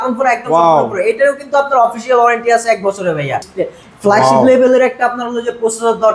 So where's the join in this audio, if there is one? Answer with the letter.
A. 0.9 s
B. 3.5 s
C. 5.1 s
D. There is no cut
B